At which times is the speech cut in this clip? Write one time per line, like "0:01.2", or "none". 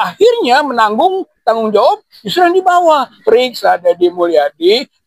0:03.1

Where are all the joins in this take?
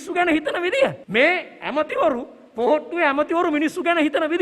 0:01.0

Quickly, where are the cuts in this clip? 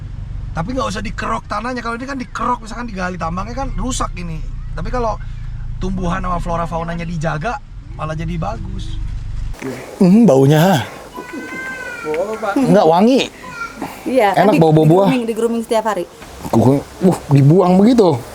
0:09.5
0:16.3

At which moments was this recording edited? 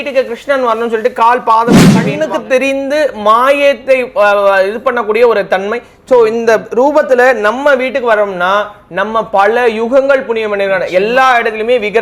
0:02.1

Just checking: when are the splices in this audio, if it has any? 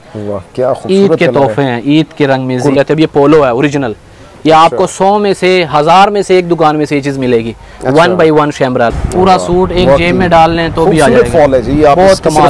0:02.8
0:08.9

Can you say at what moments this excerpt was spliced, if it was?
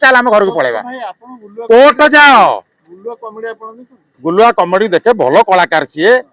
none

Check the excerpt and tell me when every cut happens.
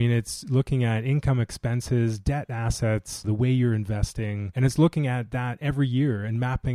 0:03.2
0:04.4

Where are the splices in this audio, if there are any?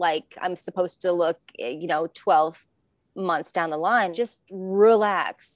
0:04.1

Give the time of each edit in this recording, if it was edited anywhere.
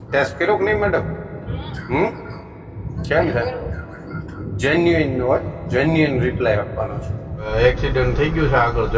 0:07.5

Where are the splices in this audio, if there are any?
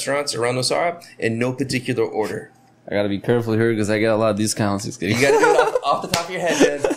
none

